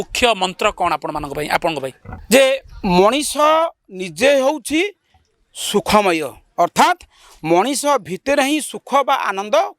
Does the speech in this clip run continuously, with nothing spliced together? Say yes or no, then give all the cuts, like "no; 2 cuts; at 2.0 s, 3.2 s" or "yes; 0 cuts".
no; 1 cut; at 2.1 s